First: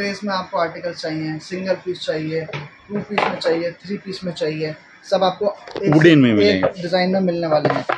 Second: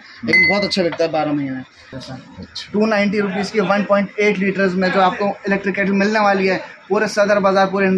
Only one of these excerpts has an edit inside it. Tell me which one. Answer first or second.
second